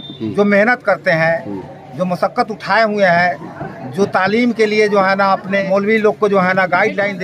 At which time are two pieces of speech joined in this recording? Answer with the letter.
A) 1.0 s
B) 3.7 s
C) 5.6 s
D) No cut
C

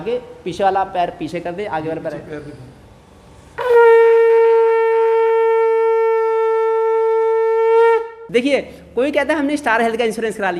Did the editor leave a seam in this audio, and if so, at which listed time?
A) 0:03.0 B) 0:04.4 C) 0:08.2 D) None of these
C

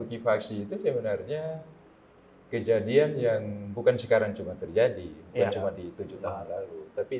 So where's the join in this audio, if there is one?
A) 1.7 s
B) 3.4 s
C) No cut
C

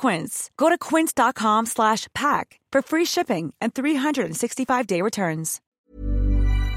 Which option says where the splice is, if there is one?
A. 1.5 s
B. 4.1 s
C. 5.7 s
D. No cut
C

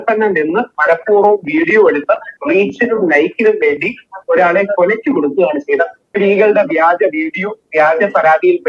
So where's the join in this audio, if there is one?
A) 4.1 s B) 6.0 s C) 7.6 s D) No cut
B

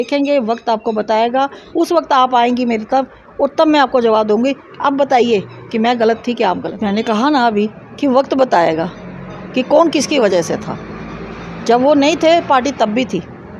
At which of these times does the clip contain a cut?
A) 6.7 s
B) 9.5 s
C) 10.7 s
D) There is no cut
A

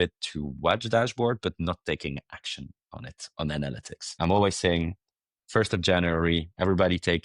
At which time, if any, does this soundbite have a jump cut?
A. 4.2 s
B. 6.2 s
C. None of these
A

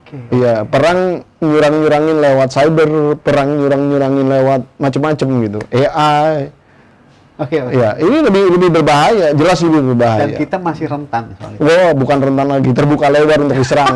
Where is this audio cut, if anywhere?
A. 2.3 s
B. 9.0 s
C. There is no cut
C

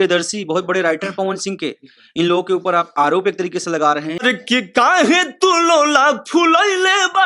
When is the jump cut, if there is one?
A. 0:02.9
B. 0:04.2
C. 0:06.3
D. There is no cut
B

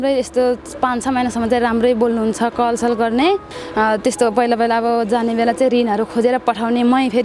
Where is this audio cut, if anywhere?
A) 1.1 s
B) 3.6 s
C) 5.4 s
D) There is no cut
B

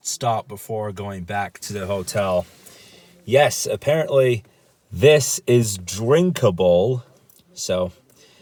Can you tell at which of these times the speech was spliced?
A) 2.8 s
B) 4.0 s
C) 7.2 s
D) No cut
D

